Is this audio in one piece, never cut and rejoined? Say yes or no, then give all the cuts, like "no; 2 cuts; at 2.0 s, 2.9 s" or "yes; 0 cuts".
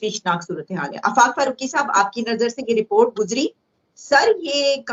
yes; 0 cuts